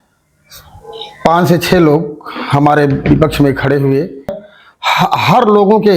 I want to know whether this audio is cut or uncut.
cut